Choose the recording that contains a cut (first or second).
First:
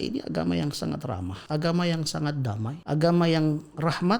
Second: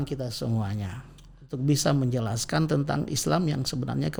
first